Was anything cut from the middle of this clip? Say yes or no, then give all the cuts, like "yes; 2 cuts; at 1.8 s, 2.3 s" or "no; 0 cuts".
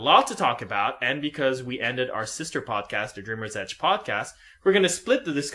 yes; 1 cut; at 2.3 s